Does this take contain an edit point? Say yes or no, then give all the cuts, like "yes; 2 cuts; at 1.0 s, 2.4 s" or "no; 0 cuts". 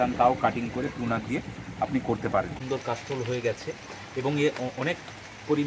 yes; 1 cut; at 2.6 s